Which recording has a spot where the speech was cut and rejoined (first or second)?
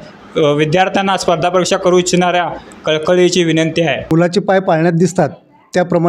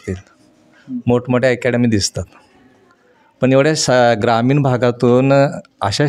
first